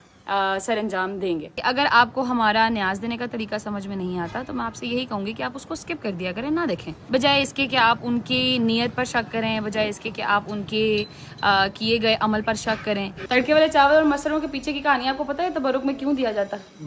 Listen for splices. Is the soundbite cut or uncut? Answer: cut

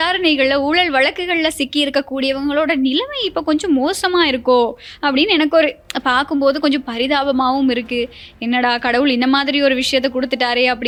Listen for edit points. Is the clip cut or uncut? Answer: uncut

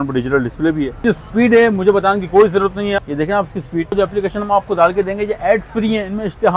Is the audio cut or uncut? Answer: cut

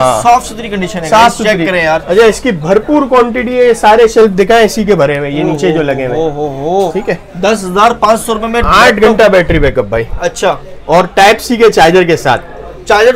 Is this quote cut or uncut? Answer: uncut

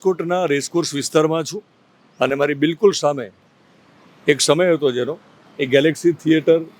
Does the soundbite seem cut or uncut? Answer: uncut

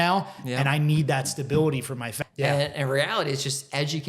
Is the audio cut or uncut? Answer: cut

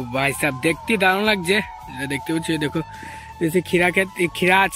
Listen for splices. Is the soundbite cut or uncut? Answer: uncut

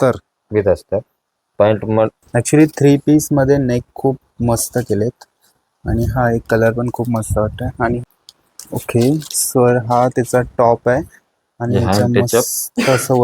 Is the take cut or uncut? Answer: cut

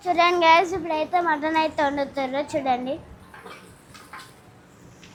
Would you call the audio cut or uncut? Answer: uncut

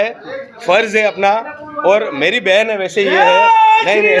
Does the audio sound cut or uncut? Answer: uncut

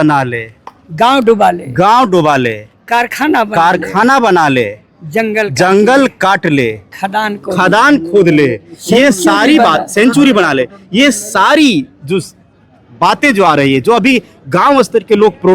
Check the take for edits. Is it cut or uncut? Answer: uncut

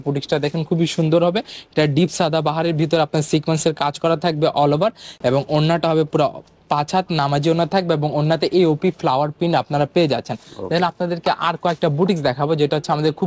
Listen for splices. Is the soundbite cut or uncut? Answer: uncut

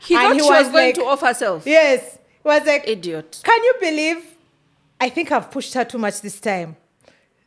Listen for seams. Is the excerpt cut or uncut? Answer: uncut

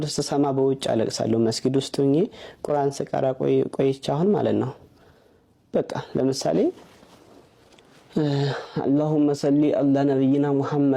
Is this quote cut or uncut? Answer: uncut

